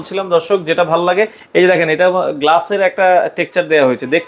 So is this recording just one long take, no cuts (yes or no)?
yes